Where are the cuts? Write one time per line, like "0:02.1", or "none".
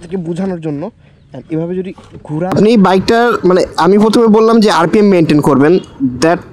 0:02.5

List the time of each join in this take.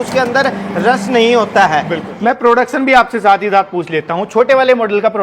0:02.0

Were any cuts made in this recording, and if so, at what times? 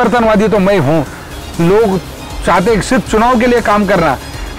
0:01.2

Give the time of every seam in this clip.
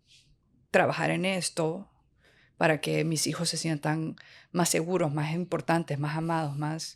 none

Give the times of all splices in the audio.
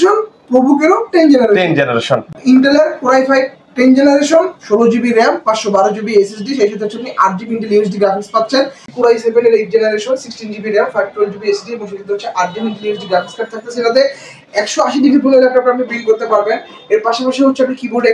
0:02.3
0:08.9

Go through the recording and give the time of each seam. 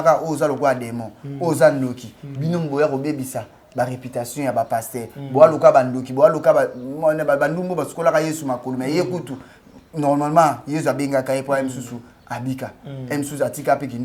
none

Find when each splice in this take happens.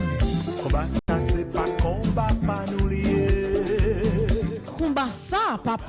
0:01.0

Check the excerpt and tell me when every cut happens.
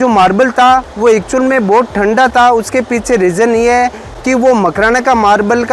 none

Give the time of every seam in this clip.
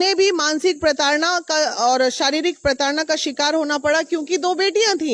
none

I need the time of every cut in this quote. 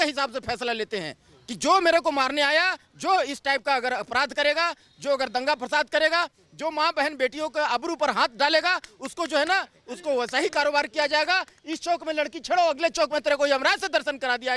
none

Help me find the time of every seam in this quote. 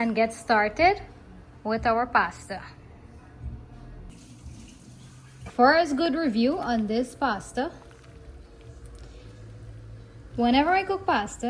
0:04.1
0:05.4

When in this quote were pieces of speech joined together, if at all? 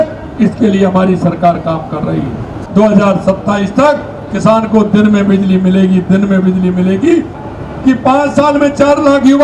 0:02.6
0:07.4

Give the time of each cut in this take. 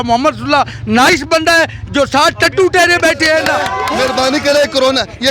0:03.8

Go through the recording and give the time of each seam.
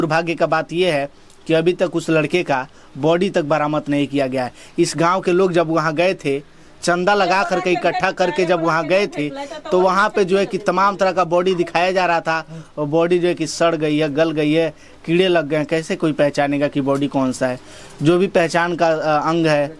none

